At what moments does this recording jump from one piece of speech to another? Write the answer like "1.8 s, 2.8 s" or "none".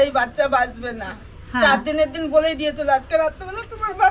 none